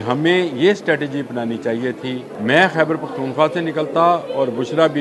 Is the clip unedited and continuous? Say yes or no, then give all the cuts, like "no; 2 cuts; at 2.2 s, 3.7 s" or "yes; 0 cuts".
no; 1 cut; at 2.3 s